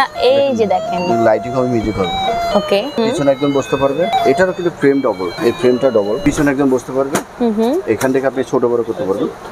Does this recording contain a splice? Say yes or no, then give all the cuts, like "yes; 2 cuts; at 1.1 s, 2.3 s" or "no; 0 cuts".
yes; 4 cuts; at 3.0 s, 4.1 s, 5.3 s, 6.2 s